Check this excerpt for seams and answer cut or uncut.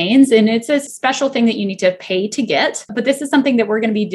cut